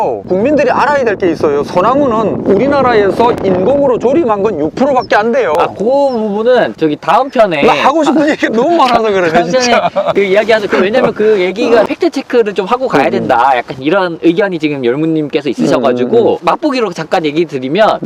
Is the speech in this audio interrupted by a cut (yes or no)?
no